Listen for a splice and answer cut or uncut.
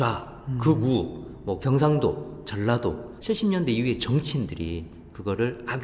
cut